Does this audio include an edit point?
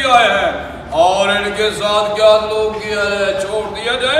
no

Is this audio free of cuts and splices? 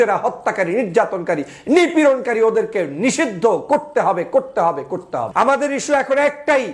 no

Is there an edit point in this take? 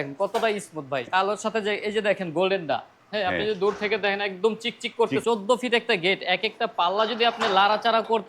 yes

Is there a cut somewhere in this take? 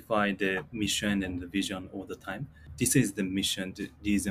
yes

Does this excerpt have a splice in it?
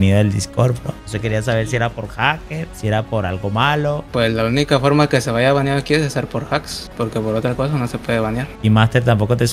yes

